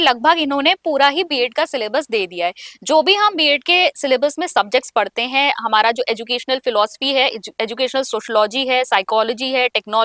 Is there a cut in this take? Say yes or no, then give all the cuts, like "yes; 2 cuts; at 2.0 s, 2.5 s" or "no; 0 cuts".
no; 0 cuts